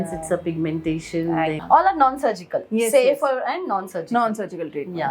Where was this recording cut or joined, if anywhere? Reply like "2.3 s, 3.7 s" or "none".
1.6 s